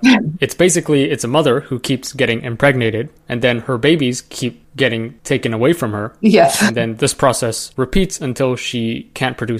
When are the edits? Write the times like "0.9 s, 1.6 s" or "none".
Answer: 7.6 s